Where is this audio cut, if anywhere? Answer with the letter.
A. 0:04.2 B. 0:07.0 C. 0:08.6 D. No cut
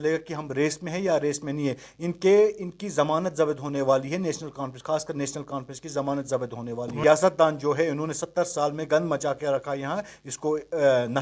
B